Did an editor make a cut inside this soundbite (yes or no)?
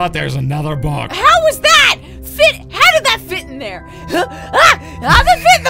yes